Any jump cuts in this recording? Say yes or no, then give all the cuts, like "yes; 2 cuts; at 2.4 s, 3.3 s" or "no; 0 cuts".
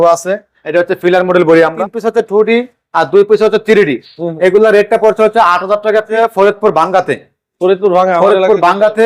yes; 2 cuts; at 1.8 s, 6.1 s